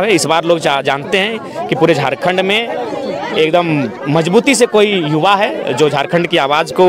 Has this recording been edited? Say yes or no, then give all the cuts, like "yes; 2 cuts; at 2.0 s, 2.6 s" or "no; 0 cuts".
no; 0 cuts